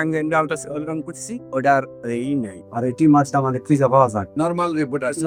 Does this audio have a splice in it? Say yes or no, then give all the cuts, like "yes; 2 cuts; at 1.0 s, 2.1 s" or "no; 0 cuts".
no; 0 cuts